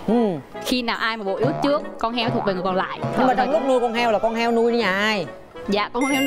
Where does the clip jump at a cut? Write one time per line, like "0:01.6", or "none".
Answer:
0:03.1